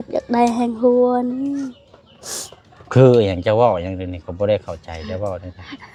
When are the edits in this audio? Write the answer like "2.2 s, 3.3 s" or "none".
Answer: none